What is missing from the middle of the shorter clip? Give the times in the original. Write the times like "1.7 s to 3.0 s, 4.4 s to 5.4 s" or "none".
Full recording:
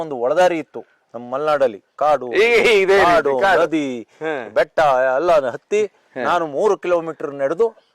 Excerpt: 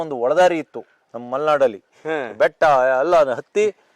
1.9 s to 4.0 s

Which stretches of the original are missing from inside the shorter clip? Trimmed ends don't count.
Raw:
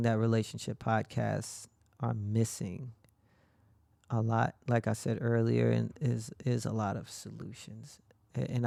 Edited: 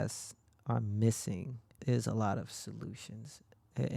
3.1 s to 6.3 s

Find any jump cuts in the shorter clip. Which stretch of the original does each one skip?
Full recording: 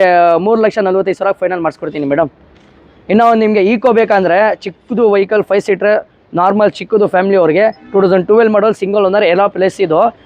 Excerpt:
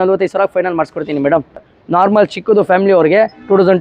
2.6 s to 6.2 s

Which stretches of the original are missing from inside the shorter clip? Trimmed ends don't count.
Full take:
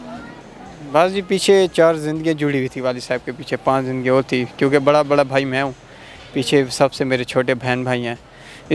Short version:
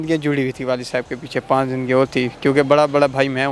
none

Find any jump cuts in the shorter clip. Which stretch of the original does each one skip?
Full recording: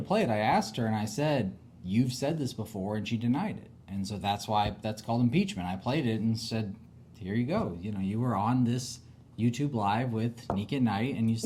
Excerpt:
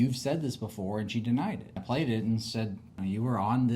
3.7 s to 5.7 s, 6.9 s to 7.9 s

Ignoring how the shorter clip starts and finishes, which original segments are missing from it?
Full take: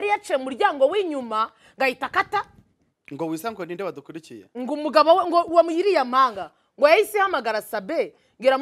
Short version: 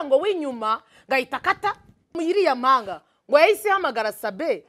2.9 s to 5.7 s

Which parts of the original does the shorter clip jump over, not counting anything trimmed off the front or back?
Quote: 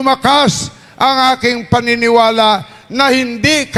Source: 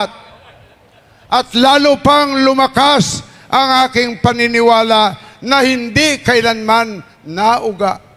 none

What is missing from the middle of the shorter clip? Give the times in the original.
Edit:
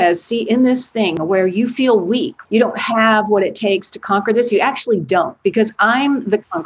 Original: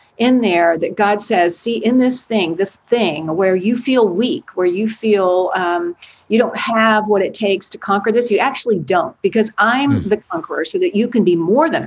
2.5 s to 3.2 s, 4.4 s to 6.1 s

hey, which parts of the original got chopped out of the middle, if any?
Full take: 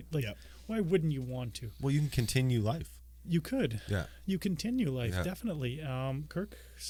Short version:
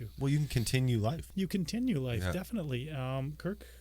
2.9 s to 4.2 s

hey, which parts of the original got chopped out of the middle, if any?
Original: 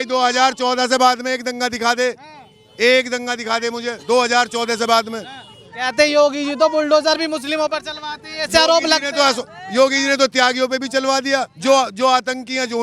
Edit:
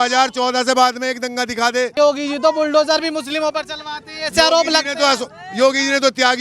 2.2 s to 6.1 s

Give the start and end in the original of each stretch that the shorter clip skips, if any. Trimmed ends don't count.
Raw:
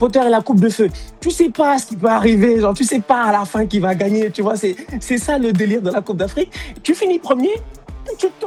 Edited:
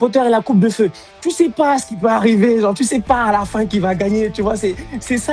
none

